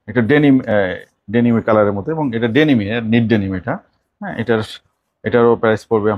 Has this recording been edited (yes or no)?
no